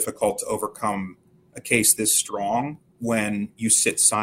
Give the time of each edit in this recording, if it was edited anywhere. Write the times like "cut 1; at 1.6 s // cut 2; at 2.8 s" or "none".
cut 1; at 2.8 s